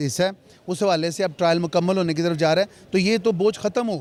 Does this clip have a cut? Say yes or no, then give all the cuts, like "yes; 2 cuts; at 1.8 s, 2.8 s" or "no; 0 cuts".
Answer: no; 0 cuts